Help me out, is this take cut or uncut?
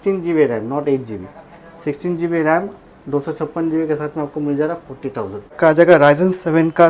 cut